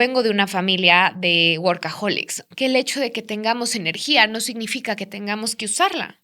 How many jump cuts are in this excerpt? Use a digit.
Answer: 1